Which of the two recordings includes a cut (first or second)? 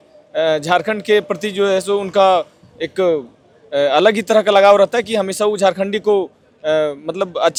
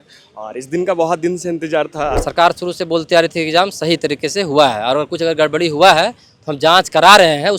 second